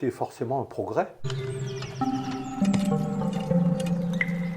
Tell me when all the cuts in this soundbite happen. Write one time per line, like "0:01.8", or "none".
0:01.2